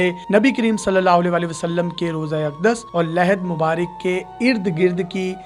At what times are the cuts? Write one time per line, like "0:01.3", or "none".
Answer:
none